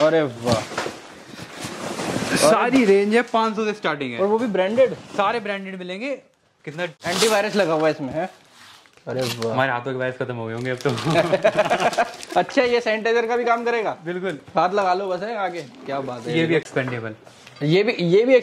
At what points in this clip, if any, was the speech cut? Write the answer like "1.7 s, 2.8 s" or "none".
7.0 s, 16.7 s